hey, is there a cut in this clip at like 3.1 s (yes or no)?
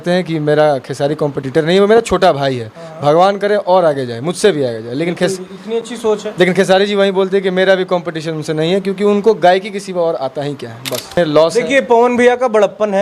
no